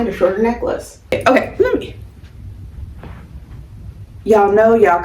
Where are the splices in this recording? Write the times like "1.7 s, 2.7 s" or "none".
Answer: 1.1 s